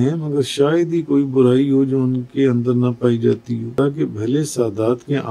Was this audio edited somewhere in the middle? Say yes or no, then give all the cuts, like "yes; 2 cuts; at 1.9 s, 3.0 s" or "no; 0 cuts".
yes; 1 cut; at 3.7 s